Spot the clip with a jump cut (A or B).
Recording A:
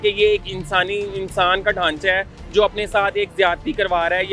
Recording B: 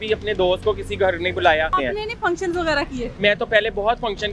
B